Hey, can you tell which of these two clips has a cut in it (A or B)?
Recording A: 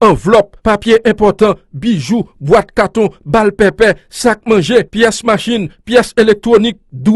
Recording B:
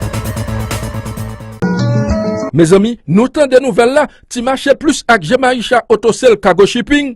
B